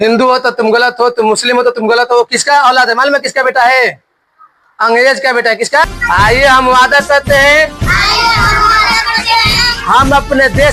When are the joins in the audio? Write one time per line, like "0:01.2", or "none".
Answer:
0:05.8

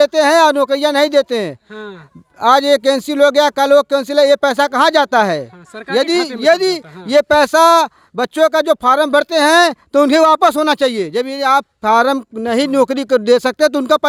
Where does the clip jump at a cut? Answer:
none

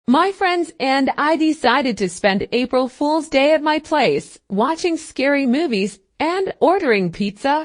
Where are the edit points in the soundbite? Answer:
0:04.4

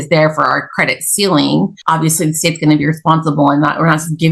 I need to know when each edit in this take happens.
0:01.8

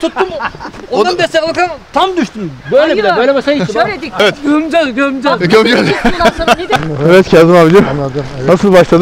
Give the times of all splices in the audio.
0:04.2
0:06.8

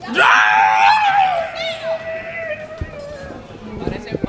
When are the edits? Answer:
none

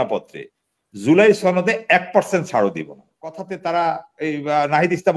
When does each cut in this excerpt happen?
0:03.4

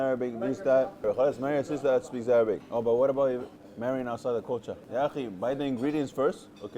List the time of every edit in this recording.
0:01.0

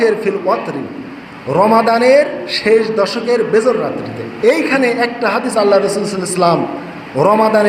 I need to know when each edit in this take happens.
0:04.2

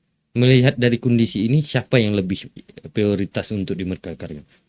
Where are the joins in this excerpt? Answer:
0:02.6

